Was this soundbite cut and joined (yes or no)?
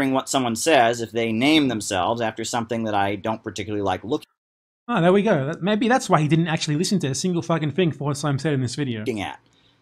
no